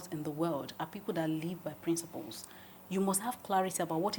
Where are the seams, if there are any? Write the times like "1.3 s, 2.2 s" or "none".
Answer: none